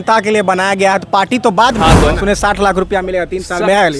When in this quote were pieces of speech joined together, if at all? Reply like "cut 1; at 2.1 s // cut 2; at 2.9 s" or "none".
cut 1; at 2.2 s